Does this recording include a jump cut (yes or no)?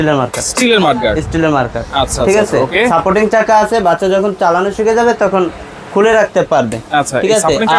no